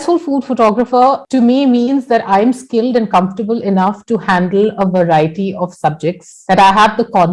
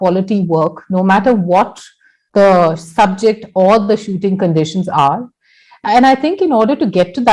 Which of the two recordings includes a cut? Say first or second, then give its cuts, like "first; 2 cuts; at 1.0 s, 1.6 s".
first; 2 cuts; at 1.2 s, 6.3 s